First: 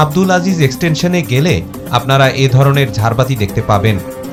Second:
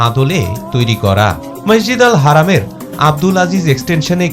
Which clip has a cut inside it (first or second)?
second